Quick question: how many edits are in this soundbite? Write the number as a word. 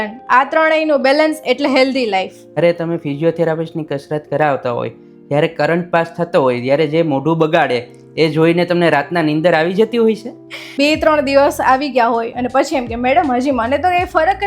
two